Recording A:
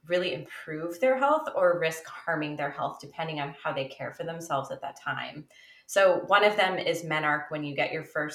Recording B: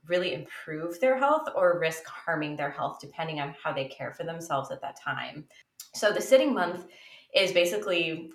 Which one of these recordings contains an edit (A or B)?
B